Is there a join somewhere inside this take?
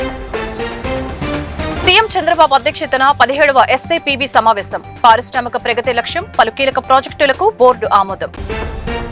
no; 0 cuts

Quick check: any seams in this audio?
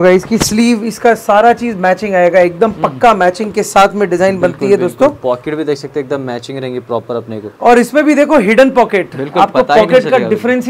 no; 0 cuts

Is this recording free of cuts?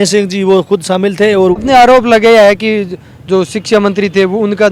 no; 1 cut; at 1.6 s

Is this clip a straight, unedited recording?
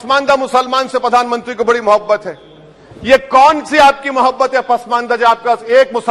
yes; 0 cuts

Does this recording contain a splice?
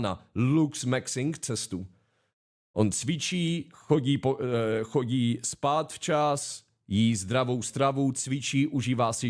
no; 0 cuts

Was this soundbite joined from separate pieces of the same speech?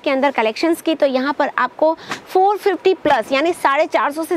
no; 0 cuts

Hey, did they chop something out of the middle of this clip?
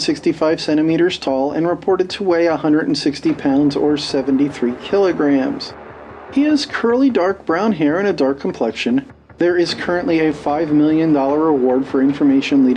no; 0 cuts

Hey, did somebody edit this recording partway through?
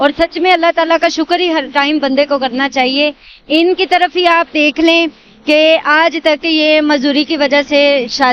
no; 0 cuts

